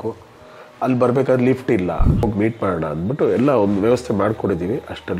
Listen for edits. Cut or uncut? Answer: cut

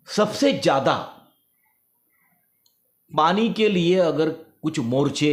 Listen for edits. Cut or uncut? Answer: uncut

